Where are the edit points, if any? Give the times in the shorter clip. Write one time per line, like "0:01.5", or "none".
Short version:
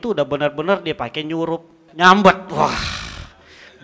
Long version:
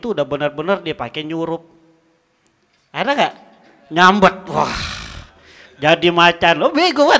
0:01.8